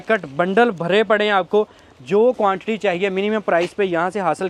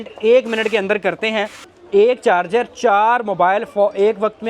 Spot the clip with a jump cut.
second; 1 cut; at 1.7 s

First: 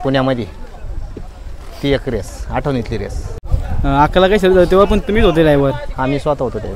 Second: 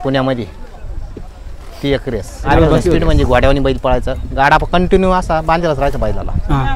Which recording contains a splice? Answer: second; 1 cut; at 2.4 s

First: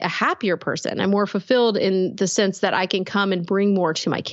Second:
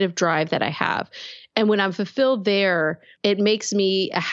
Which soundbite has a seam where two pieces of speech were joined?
second; 1 cut; at 3.0 s

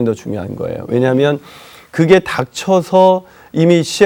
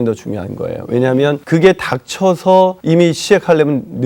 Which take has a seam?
second; 2 cuts; at 1.4 s, 2.8 s

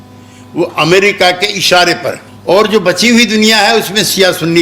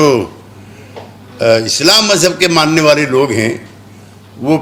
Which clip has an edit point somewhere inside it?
first; 1 cut; at 2.3 s

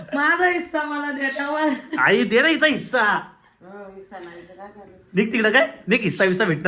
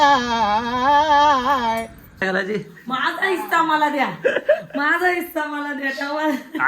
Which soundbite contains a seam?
second; 1 cut; at 2.2 s

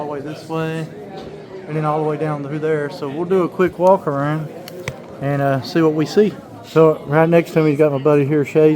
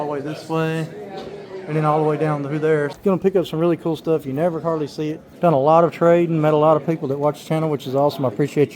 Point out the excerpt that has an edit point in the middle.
second; 2 cuts; at 2.9 s, 5.2 s

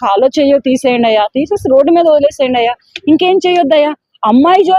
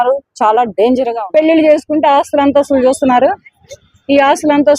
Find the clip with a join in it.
second; 1 cut; at 1.2 s

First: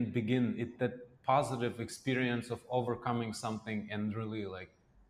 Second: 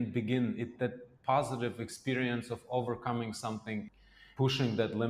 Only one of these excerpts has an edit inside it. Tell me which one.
second; 1 cut; at 3.9 s

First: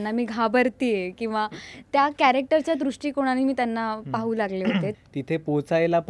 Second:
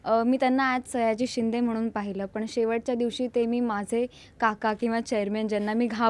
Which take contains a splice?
first; 1 cut; at 4.9 s

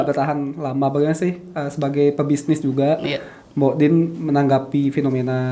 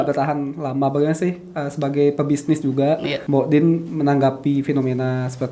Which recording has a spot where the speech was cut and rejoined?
second; 1 cut; at 3.1 s

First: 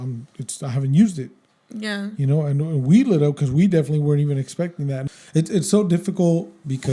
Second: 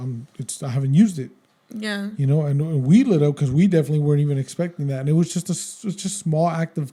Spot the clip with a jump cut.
first; 1 cut; at 5.0 s

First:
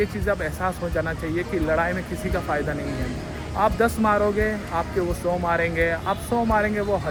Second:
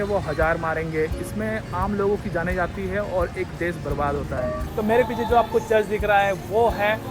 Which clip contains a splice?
second; 1 cut; at 4.6 s

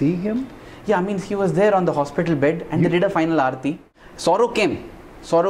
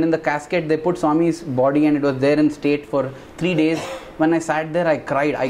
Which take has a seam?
first; 1 cut; at 3.8 s

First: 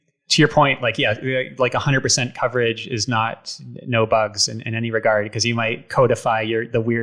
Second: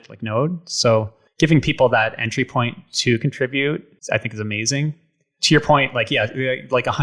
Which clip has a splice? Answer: second; 2 cuts; at 1.2 s, 3.9 s

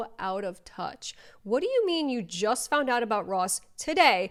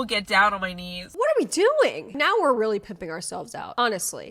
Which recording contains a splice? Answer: second; 2 cuts; at 1.0 s, 2.1 s

